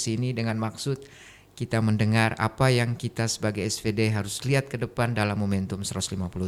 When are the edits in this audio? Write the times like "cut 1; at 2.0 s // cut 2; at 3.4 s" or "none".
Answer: none